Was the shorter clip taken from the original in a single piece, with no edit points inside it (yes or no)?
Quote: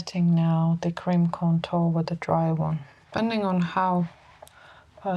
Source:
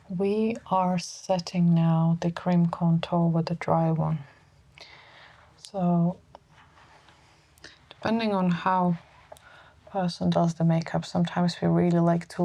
no